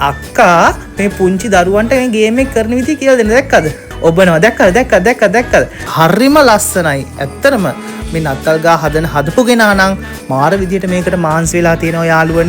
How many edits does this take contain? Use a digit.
2